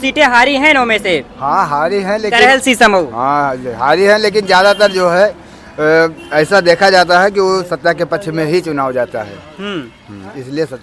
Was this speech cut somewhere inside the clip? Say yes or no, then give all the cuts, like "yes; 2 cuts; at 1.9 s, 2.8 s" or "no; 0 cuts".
no; 0 cuts